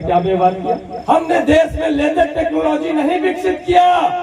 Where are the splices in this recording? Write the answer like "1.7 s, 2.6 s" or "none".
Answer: 0.9 s